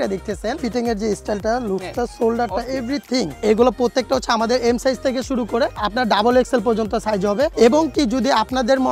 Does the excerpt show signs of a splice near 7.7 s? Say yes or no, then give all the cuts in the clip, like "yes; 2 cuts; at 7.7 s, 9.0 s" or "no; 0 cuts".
no; 1 cut; at 3.3 s